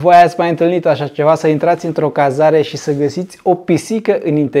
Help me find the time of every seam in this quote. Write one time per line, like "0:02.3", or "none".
none

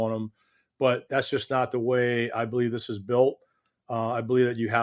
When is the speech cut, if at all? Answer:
none

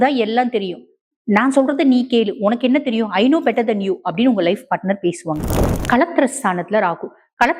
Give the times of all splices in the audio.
0:05.6

